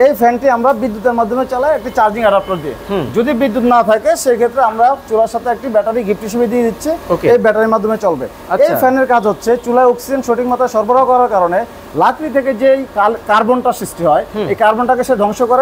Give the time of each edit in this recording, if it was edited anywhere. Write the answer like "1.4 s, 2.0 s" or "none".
none